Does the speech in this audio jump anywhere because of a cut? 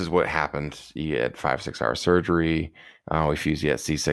no; 0 cuts

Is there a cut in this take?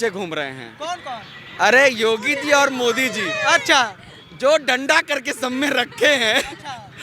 no; 0 cuts

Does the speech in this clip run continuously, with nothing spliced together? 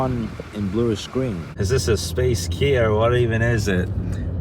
no; 1 cut; at 1.5 s

